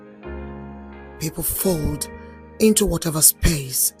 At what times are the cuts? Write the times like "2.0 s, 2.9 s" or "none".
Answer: 1.2 s